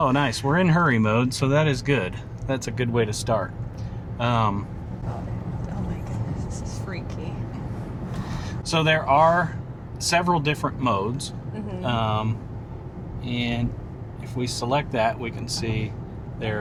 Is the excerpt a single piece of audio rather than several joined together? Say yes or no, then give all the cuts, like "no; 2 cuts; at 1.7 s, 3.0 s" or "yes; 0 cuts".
yes; 0 cuts